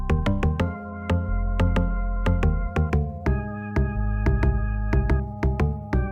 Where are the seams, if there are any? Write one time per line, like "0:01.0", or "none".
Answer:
none